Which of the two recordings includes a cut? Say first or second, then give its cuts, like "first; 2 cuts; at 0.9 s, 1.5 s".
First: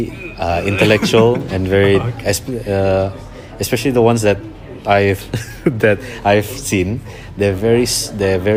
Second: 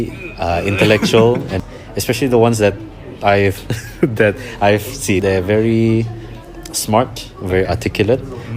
second; 2 cuts; at 1.6 s, 5.2 s